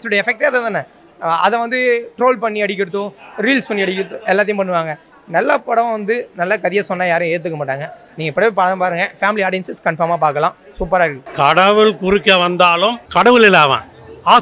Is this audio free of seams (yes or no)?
no